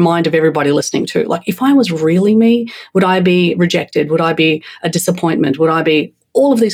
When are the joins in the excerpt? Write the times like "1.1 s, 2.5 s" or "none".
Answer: none

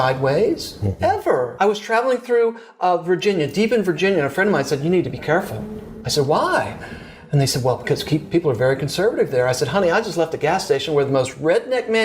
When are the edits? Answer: 1.5 s

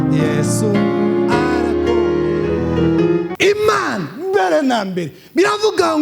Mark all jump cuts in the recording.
3.3 s

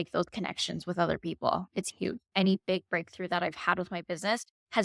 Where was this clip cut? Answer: 2.3 s

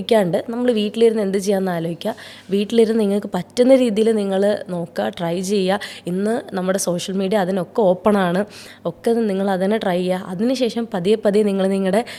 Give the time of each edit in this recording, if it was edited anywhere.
none

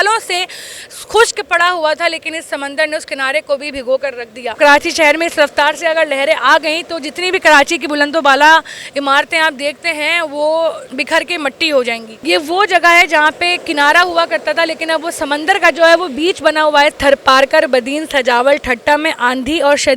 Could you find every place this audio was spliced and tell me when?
4.6 s, 10.9 s, 12.2 s, 17.0 s

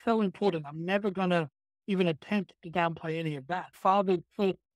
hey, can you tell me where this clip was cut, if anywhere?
3.8 s

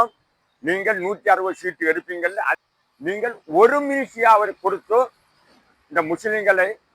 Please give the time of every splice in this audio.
2.6 s

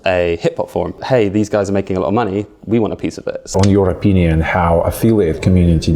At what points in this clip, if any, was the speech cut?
1.0 s, 3.5 s

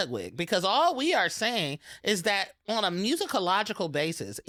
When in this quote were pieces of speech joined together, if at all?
none

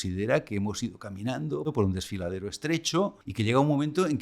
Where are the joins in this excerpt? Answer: 1.7 s, 3.2 s

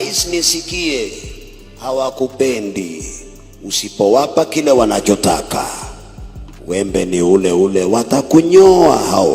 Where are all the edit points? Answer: none

